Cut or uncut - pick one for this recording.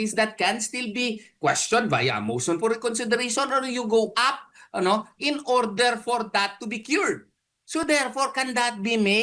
uncut